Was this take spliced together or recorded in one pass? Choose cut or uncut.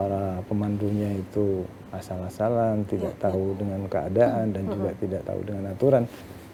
uncut